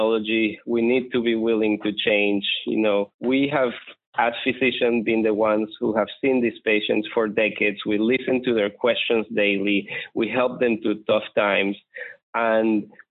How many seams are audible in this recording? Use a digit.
1